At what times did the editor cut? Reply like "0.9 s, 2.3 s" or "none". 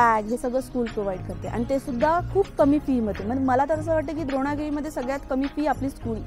none